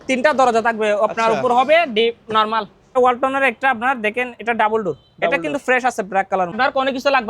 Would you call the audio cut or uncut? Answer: cut